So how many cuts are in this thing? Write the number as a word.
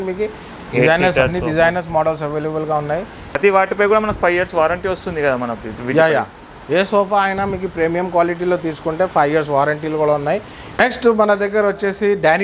two